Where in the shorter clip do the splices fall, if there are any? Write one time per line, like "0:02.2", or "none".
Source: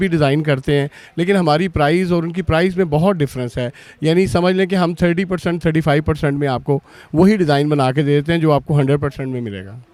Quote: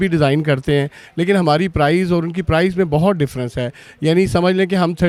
none